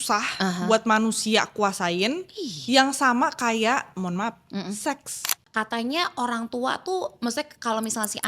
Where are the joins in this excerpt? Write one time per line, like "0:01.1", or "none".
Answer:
0:05.4